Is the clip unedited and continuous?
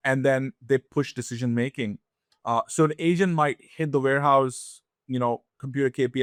yes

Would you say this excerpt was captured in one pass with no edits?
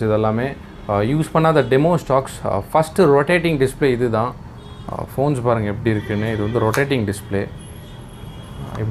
yes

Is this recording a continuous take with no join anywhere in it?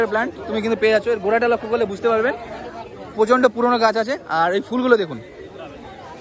yes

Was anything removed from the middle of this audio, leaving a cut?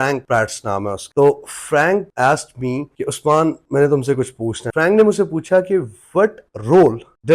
yes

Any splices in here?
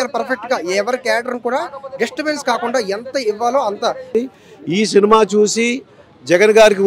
yes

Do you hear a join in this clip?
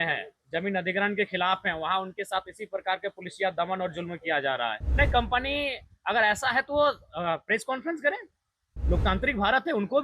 yes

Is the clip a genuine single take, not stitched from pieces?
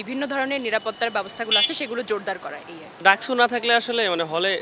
no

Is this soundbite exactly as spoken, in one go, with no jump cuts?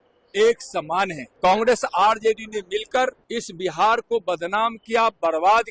no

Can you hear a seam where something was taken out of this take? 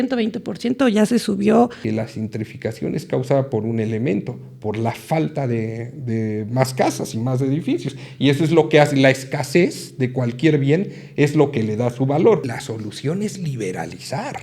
yes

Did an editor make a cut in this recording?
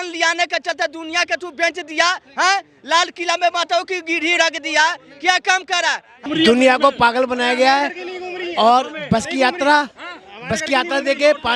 yes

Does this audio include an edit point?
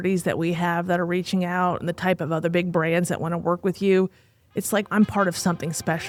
no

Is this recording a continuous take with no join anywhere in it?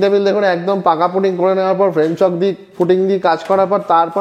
yes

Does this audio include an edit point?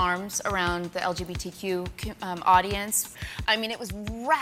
no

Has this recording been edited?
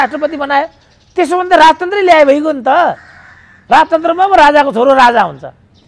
no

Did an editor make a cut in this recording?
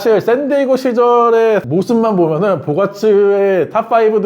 no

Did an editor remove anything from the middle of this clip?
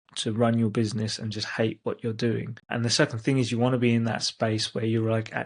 yes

